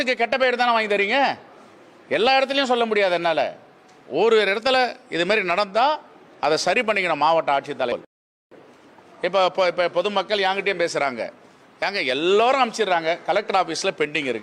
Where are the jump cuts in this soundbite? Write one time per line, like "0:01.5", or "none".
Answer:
0:08.2